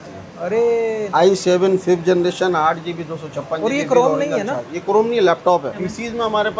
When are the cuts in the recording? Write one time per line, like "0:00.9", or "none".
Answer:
0:01.1
0:05.7